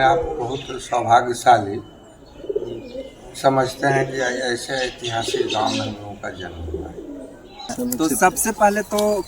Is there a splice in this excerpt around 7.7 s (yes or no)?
yes